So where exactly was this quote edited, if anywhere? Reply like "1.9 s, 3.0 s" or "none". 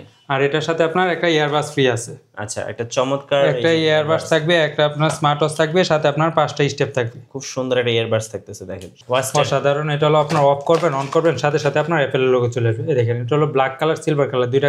8.9 s